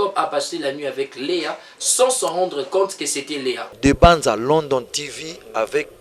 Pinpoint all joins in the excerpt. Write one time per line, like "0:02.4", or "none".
0:03.7